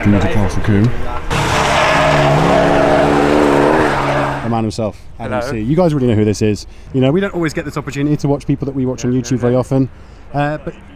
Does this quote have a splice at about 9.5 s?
no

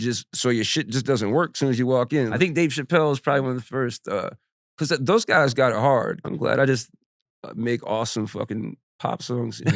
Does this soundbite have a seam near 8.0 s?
no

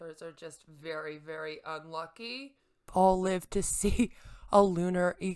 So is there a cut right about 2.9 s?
yes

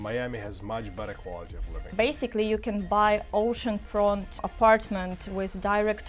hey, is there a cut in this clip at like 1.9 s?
yes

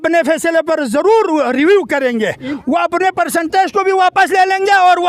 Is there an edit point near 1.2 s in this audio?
no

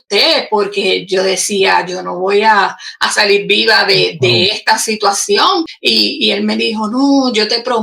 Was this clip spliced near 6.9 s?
no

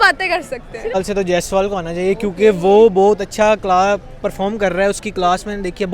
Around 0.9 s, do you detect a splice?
yes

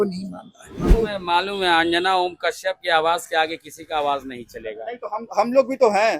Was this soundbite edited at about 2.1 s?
no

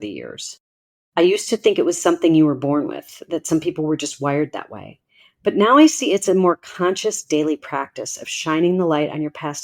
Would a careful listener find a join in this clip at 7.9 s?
no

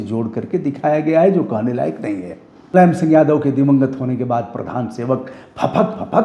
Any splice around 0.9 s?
no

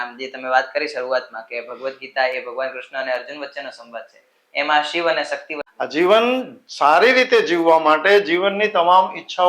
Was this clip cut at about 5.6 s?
yes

